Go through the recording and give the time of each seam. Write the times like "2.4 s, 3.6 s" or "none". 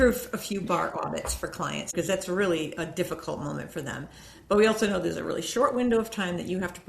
1.9 s